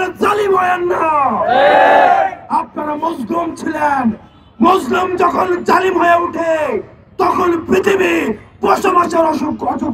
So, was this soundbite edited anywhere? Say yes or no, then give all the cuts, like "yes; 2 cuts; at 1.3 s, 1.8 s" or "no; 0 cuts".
no; 0 cuts